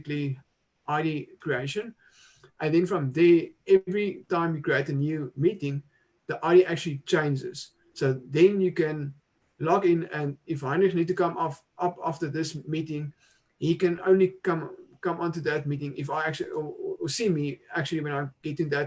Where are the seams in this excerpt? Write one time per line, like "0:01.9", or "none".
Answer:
none